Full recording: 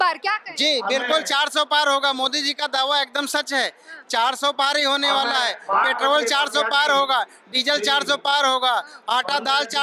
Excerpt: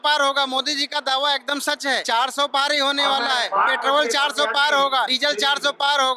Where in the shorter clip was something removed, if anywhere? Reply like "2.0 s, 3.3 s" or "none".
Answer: 2.0 s, 3.5 s, 5.1 s